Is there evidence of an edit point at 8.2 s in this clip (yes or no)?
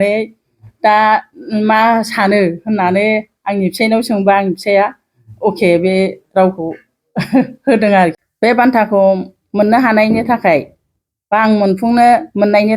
yes